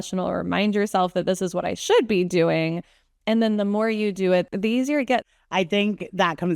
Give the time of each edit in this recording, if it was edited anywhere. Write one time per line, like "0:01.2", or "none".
0:04.5
0:05.3

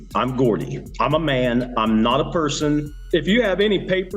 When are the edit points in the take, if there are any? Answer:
0:02.9

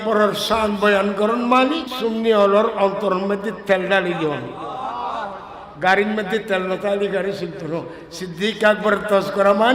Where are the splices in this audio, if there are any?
0:01.9

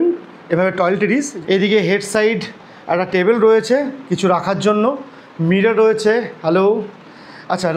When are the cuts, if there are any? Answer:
none

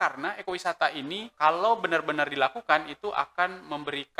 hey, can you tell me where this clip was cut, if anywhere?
0:01.3

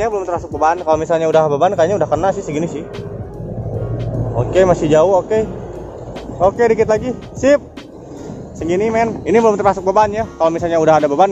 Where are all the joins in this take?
none

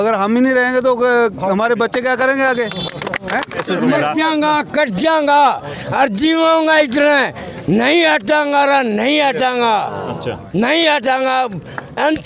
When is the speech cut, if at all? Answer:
0:03.7

